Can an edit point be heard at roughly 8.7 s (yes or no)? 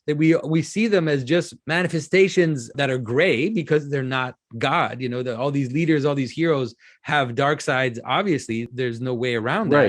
yes